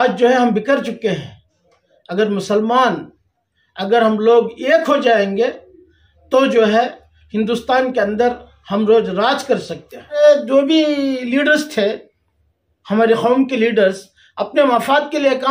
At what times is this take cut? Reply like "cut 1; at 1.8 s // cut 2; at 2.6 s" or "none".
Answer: cut 1; at 10.2 s